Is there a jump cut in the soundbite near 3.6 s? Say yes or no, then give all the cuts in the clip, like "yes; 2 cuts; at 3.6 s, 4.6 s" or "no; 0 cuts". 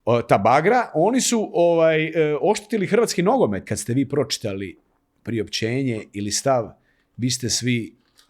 yes; 1 cut; at 3.6 s